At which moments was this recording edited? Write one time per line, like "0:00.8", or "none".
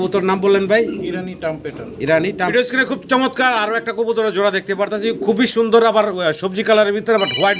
0:02.5